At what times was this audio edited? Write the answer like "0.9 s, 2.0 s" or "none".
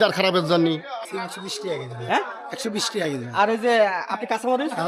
1.0 s